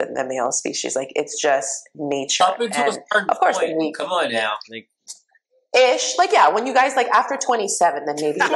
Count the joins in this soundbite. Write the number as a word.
zero